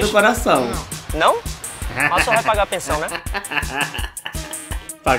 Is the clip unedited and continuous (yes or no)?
yes